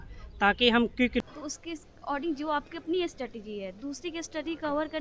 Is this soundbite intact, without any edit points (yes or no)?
no